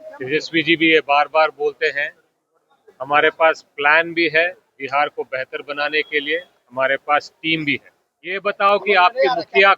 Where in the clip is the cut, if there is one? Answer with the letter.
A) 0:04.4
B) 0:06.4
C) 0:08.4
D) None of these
C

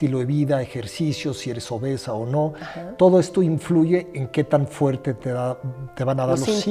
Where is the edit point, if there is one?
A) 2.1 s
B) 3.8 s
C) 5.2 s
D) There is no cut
D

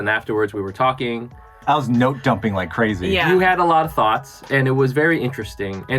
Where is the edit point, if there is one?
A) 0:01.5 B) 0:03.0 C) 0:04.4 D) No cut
A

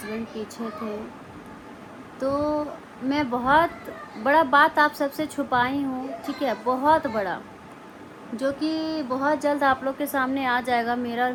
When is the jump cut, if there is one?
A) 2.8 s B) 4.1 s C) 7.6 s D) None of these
D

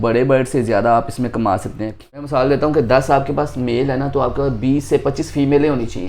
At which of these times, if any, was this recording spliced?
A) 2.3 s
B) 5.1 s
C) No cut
A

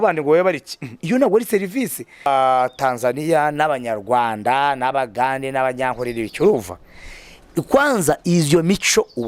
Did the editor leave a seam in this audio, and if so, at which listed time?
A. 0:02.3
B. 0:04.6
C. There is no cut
A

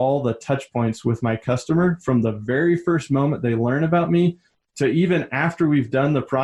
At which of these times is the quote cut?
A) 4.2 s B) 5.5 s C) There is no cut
C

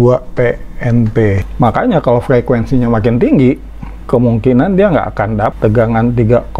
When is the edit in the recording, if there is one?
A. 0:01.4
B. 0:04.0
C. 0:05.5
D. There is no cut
A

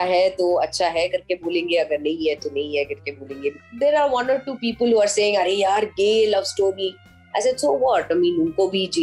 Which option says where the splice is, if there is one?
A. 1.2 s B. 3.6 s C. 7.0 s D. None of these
B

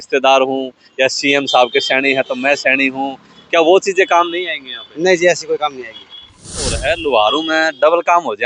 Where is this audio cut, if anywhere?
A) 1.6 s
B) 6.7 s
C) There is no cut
B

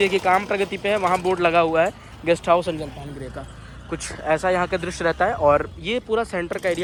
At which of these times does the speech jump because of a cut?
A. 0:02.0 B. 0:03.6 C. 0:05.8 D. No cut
D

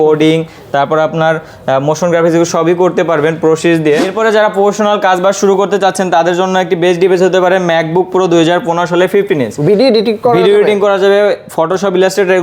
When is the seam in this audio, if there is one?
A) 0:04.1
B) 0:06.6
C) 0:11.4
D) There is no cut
A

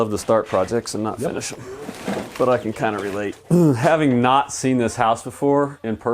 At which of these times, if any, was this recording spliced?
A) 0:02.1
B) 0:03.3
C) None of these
B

